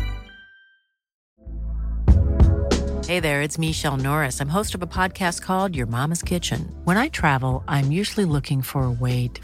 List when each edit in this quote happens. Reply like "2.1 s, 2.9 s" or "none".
1.2 s

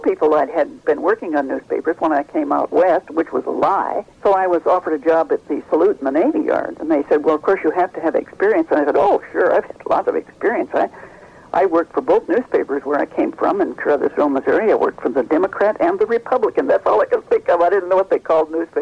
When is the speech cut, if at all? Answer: none

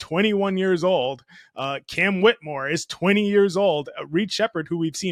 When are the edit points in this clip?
none

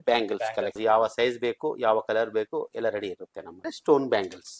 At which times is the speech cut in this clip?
0.8 s, 3.7 s

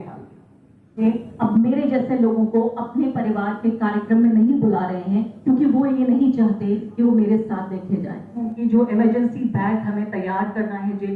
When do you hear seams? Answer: 1.0 s, 8.5 s

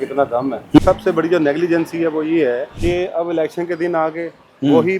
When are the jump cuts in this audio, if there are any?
0.8 s, 2.7 s

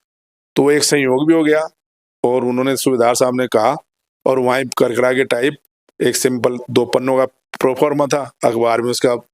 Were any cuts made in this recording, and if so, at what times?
none

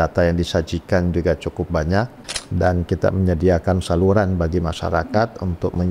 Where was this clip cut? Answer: 2.1 s

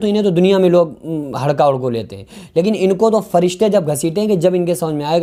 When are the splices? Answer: none

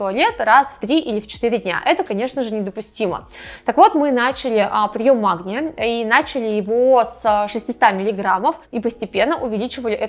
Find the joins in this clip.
none

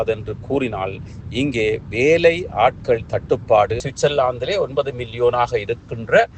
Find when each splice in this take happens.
3.9 s

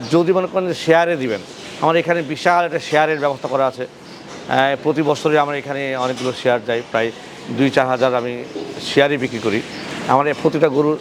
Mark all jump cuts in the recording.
none

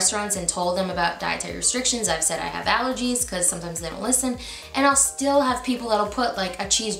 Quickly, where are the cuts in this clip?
none

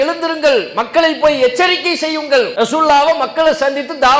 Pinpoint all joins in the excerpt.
2.5 s

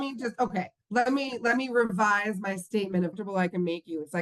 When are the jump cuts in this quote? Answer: 3.1 s

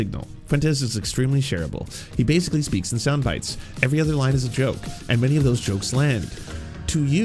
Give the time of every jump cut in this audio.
none

